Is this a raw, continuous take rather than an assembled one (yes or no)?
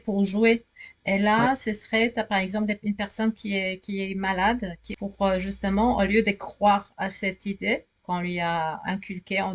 no